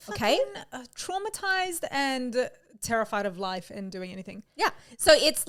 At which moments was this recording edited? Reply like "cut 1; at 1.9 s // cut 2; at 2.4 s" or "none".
none